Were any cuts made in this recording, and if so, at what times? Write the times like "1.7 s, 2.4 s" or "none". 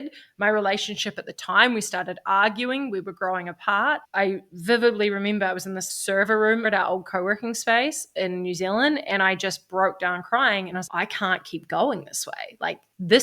4.1 s, 6.7 s